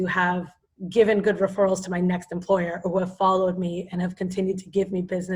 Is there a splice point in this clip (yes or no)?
no